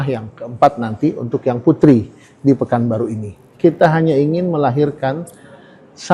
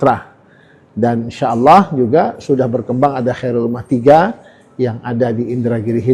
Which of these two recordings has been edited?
first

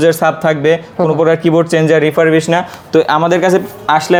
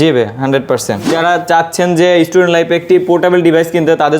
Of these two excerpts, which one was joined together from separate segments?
second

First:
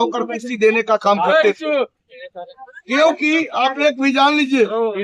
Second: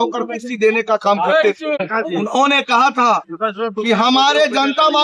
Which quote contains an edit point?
second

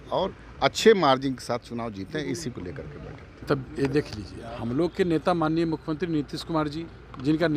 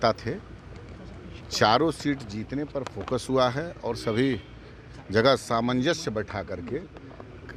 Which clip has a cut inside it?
first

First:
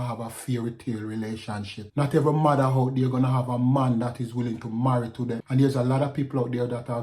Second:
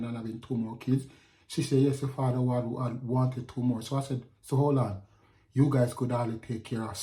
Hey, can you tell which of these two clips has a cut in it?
first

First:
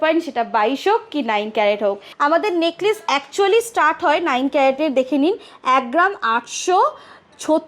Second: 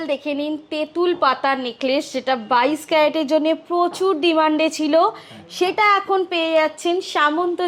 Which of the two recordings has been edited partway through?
first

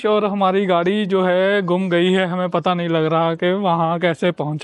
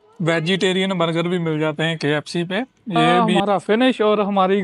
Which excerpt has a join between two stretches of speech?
second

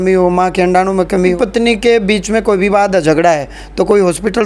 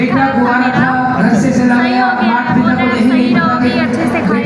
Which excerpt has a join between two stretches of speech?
first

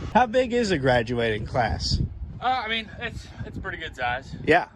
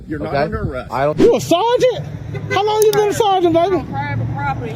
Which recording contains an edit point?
second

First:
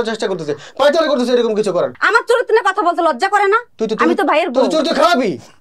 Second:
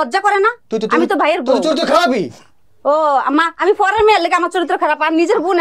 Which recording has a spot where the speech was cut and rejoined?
first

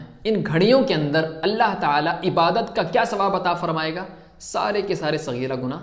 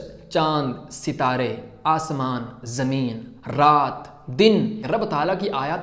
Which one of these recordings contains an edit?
second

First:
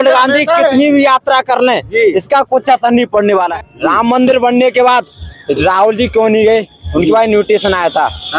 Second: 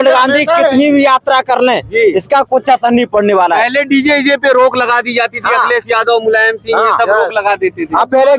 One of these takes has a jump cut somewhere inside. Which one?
first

